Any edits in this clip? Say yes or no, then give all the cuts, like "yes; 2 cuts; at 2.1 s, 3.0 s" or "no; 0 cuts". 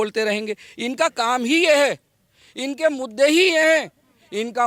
no; 0 cuts